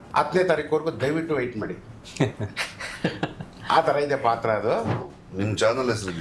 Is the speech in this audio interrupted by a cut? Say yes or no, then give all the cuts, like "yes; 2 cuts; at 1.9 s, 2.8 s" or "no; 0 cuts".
yes; 1 cut; at 5.0 s